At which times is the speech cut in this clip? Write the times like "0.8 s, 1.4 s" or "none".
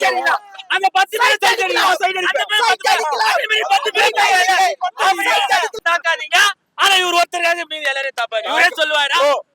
5.7 s